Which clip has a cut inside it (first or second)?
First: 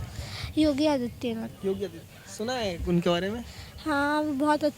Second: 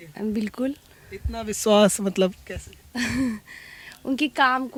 first